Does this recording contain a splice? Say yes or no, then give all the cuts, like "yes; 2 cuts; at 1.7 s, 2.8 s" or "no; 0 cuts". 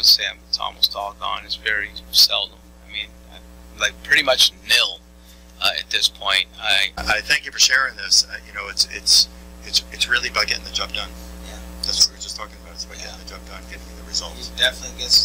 yes; 1 cut; at 7.0 s